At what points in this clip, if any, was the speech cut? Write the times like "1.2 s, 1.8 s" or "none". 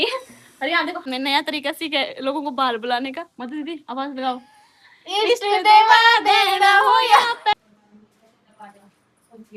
1.0 s, 7.5 s